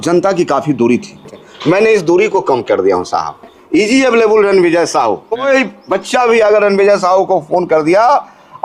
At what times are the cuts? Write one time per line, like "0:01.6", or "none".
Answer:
0:01.4
0:03.6
0:05.4